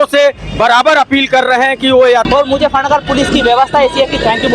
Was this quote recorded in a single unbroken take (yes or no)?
no